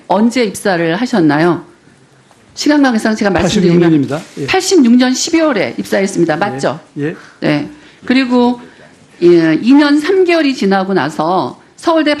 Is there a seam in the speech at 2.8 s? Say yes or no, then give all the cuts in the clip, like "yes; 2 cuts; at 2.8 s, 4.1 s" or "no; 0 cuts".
no; 1 cut; at 8.1 s